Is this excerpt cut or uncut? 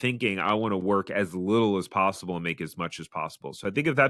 uncut